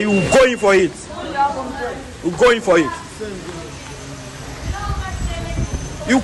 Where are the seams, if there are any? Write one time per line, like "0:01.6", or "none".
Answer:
none